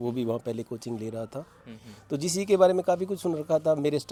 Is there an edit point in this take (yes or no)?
no